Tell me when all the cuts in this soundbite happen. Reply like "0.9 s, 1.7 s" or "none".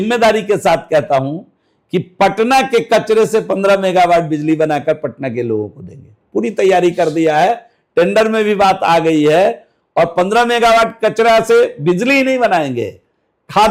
none